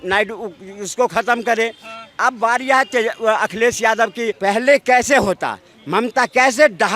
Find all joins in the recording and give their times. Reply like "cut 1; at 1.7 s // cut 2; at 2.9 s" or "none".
cut 1; at 4.4 s